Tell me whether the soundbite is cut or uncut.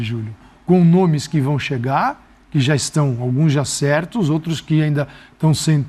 uncut